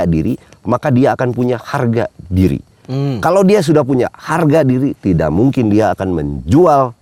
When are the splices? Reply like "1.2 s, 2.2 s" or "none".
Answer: none